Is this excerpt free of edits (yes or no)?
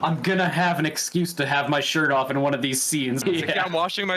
no